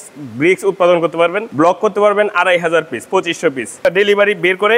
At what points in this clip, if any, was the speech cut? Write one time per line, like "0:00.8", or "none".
0:01.4
0:03.8